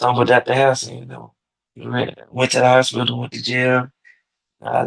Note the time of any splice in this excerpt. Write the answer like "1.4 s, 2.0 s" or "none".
none